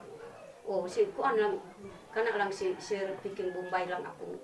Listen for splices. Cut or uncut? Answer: uncut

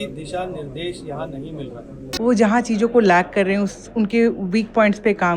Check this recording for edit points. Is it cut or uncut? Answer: cut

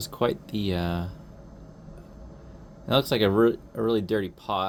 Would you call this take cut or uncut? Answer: uncut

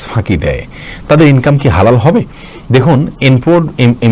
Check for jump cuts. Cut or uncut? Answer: uncut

